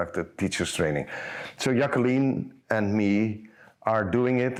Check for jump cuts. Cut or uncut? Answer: uncut